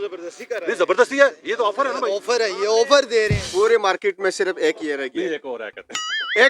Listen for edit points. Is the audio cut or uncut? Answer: cut